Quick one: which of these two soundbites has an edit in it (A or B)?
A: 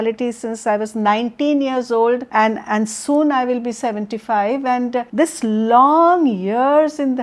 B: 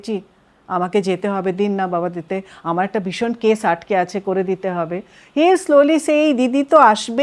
A